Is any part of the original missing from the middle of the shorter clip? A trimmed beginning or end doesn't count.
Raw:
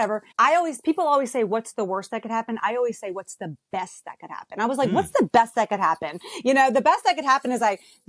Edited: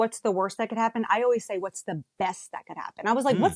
no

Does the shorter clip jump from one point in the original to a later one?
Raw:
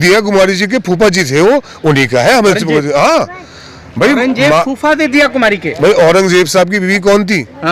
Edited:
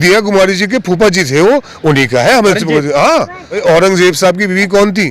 yes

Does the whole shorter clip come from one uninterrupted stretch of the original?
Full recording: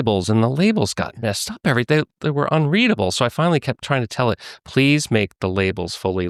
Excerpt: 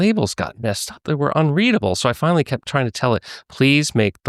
no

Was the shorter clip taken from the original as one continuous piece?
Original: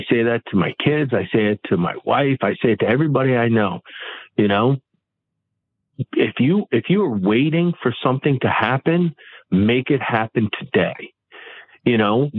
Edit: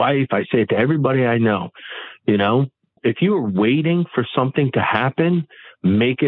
no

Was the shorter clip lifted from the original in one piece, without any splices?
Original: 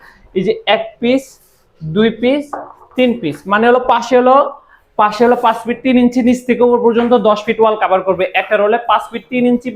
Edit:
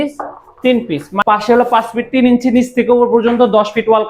no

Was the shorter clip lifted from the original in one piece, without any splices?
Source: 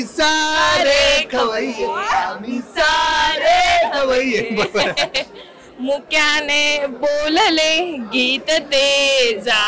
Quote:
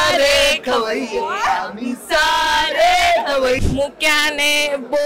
no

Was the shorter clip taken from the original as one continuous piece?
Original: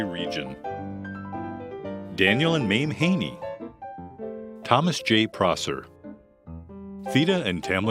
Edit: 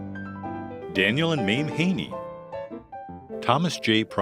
no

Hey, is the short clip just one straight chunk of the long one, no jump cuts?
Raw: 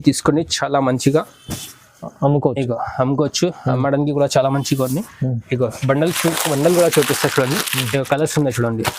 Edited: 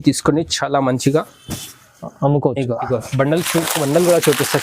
no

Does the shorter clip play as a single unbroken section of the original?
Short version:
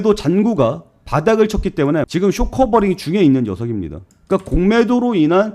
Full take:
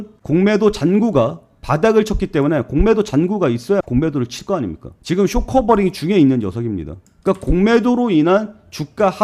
no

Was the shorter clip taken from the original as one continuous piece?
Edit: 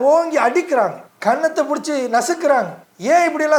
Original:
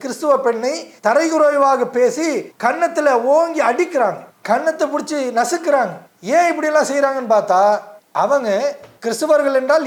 yes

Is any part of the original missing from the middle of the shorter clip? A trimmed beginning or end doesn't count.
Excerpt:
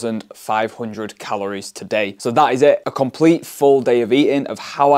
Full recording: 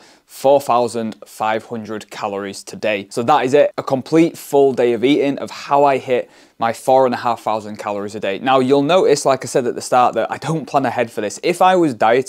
no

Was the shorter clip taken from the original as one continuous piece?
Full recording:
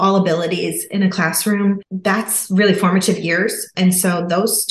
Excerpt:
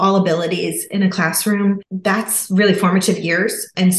yes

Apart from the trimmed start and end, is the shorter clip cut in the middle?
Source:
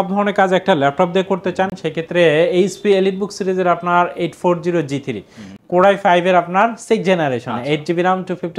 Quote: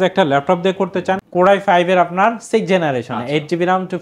yes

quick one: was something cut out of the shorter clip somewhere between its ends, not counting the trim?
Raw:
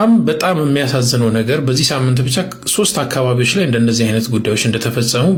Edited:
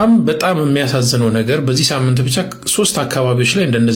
no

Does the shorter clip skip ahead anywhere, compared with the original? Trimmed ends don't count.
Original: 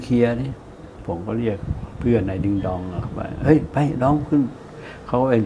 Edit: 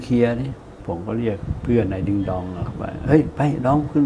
yes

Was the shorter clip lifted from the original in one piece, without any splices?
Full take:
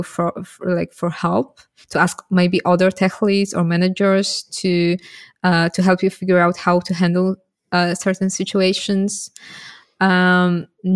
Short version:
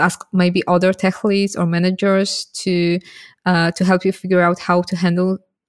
yes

